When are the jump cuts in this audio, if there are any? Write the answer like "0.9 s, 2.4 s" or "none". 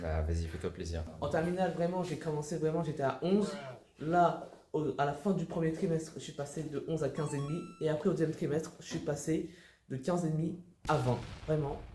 1.0 s